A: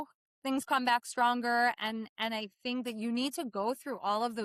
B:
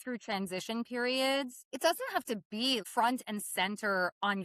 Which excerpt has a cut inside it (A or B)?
B